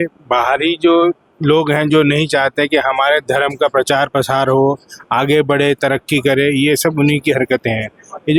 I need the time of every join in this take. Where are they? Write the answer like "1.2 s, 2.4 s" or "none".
none